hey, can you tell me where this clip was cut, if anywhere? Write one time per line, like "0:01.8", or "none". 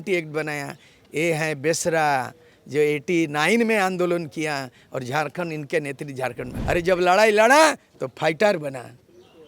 0:06.5